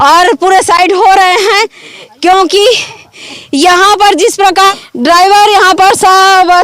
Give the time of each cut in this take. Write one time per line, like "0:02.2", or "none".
0:04.7